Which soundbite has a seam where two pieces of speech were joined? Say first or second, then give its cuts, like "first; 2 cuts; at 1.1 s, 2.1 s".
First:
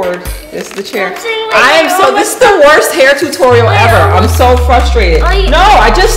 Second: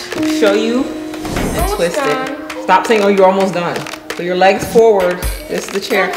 second; 1 cut; at 1.4 s